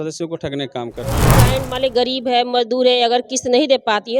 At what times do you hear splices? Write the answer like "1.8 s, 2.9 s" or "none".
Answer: 1.3 s